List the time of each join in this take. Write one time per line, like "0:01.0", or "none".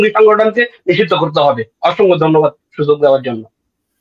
none